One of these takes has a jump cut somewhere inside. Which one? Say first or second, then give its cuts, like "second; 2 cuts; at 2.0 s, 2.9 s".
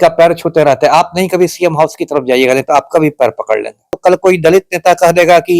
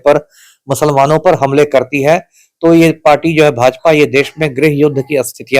first; 1 cut; at 3.9 s